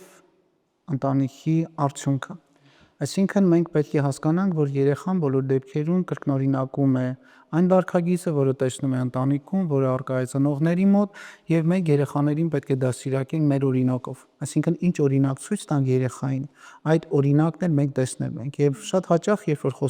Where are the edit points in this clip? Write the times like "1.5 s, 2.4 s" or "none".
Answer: none